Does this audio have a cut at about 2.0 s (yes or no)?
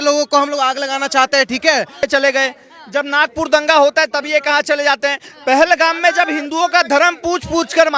yes